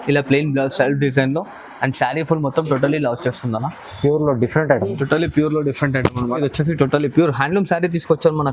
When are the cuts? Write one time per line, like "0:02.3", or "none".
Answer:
0:06.3